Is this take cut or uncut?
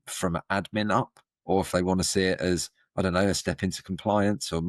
uncut